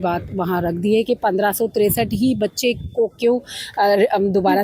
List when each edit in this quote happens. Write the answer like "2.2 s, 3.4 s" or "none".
none